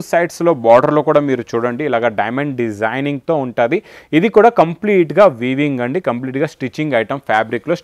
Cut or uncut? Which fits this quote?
uncut